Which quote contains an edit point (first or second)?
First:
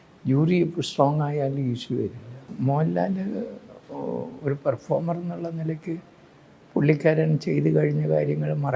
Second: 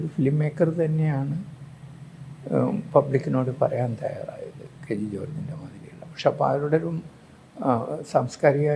first